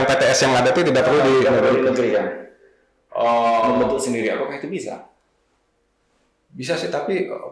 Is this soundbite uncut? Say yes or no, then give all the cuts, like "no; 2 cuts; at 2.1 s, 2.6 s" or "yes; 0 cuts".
yes; 0 cuts